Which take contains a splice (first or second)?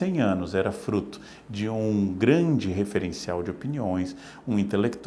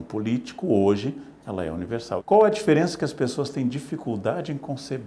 second